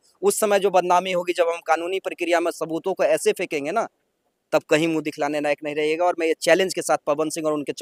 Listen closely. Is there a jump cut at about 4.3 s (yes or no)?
no